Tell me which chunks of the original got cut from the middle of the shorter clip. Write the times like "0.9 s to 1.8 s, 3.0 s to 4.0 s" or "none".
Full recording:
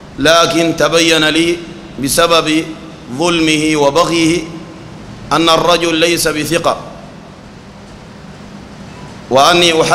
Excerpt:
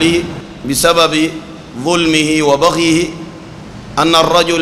none